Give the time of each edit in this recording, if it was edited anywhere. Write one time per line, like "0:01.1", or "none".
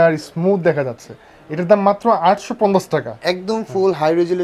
none